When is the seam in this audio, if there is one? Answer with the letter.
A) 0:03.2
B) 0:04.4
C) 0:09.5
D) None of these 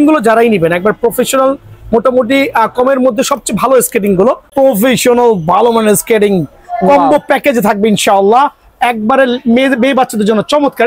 B